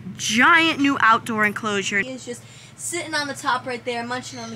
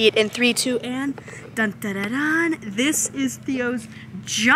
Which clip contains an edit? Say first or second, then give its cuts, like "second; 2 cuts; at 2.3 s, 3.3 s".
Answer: first; 1 cut; at 2.0 s